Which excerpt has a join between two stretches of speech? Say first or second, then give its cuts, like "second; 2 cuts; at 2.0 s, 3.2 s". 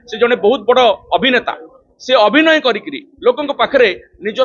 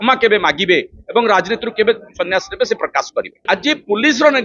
second; 1 cut; at 3.4 s